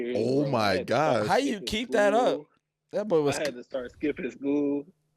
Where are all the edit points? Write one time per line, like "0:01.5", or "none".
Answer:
none